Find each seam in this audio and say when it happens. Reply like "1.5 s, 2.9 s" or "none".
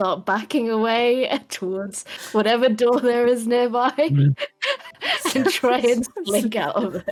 none